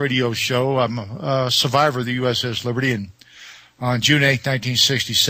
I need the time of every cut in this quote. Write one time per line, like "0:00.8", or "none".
0:01.3